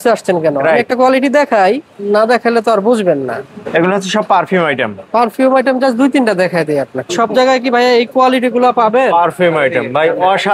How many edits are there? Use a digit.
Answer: 0